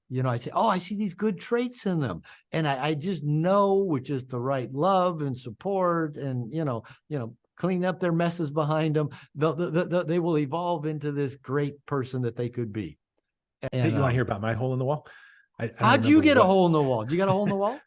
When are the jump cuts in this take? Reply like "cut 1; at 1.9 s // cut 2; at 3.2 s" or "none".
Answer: cut 1; at 13.7 s